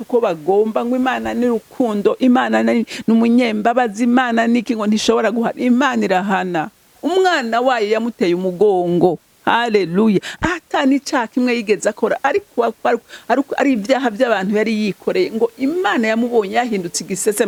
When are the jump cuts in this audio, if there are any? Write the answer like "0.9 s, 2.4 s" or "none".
none